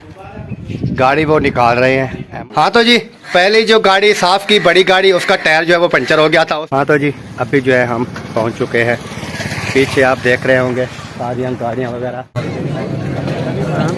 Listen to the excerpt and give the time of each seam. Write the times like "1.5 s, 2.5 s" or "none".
2.4 s, 6.6 s, 12.5 s